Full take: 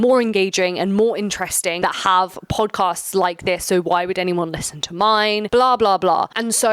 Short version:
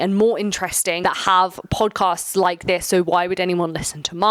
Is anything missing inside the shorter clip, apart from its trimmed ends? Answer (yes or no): no